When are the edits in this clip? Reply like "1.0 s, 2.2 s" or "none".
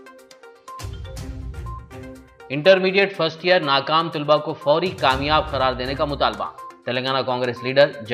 0.9 s